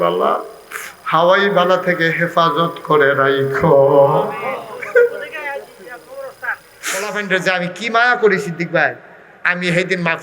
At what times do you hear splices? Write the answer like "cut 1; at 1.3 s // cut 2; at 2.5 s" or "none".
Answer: cut 1; at 7.0 s